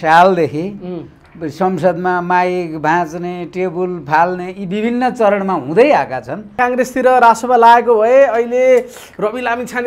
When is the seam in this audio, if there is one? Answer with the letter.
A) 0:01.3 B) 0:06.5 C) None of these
B